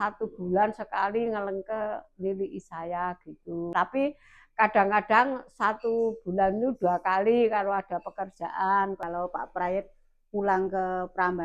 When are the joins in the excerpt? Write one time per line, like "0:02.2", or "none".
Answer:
0:03.7
0:09.0

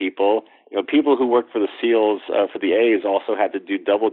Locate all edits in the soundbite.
none

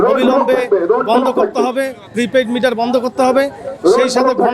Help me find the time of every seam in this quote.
none

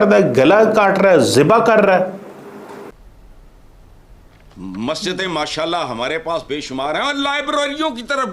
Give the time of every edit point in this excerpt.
0:02.9

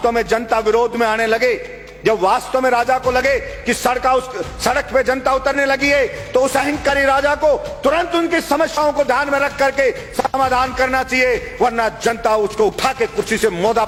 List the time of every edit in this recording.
none

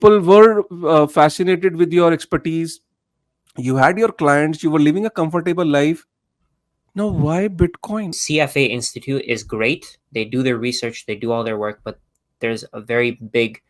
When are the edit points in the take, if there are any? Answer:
0:08.2

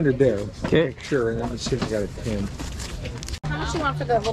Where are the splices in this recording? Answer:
0:03.4

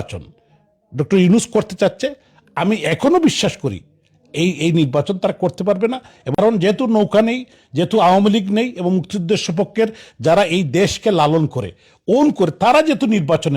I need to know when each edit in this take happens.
0:06.3

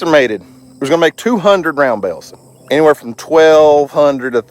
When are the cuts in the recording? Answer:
0:02.3

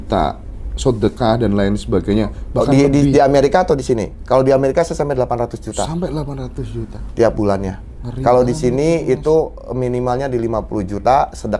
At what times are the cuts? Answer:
none

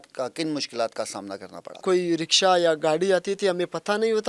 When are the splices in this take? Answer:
0:01.8

